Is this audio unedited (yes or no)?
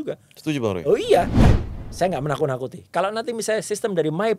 no